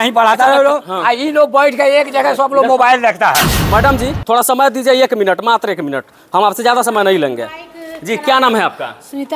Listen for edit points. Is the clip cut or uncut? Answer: cut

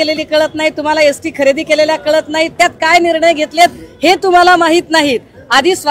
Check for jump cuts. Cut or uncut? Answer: uncut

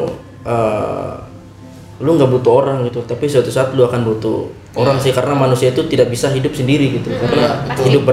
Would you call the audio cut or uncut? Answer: uncut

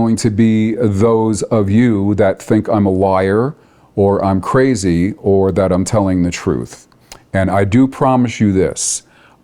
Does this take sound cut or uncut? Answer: uncut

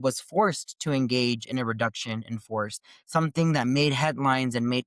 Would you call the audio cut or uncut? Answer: uncut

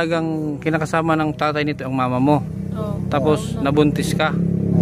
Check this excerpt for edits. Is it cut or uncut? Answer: uncut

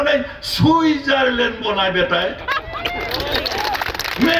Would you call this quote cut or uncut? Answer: uncut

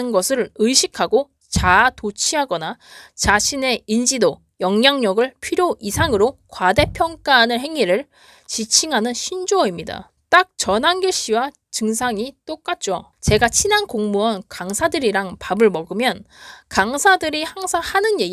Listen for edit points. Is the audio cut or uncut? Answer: uncut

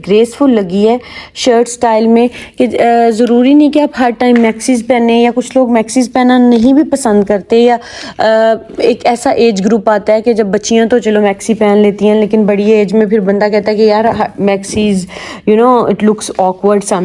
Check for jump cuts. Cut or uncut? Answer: uncut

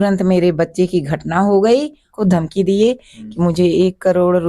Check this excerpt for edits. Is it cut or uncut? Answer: cut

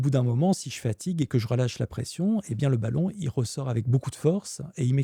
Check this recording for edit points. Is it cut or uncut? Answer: uncut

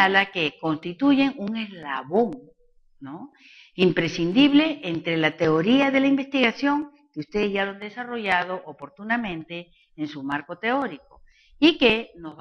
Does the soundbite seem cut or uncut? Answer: cut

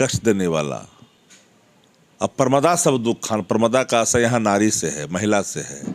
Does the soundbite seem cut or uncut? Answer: uncut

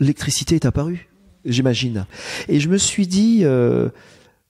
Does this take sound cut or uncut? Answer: cut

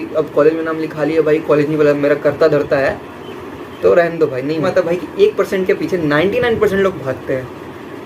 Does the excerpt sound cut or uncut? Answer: cut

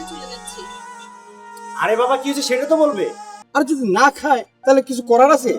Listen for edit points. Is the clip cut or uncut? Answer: cut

